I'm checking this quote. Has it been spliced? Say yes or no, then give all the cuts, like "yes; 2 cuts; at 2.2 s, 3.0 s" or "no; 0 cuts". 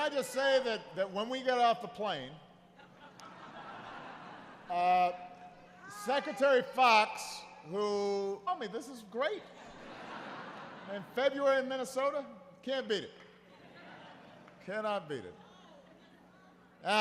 no; 0 cuts